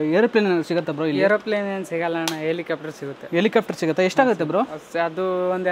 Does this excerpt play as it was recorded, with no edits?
yes; 0 cuts

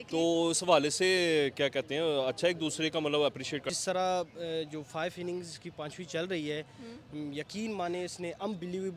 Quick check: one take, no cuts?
no; 1 cut; at 3.7 s

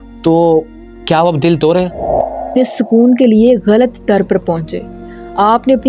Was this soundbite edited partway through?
yes; 1 cut; at 2.6 s

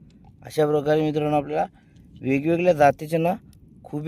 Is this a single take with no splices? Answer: yes; 0 cuts

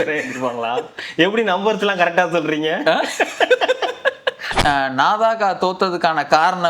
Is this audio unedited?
no; 1 cut; at 4.5 s

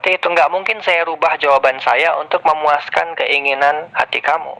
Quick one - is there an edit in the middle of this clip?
no; 0 cuts

